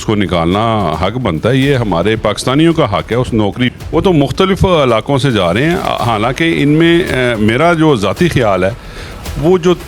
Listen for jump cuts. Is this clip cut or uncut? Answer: cut